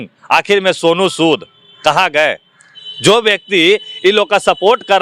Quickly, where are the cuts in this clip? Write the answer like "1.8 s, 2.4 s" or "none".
none